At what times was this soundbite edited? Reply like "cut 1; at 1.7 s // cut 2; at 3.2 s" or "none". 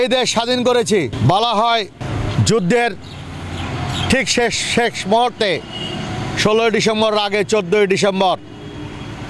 cut 1; at 1.1 s // cut 2; at 2.0 s

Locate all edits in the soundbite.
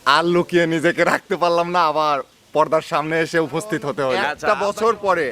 cut 1; at 4.3 s

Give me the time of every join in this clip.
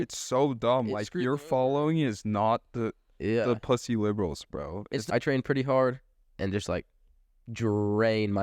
cut 1; at 5.0 s

